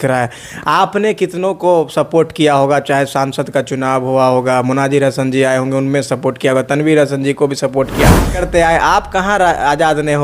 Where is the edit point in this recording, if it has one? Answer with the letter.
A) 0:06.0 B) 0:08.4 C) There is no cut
B